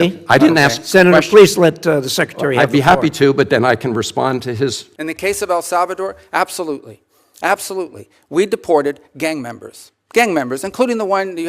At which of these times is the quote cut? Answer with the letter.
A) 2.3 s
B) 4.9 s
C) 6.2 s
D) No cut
B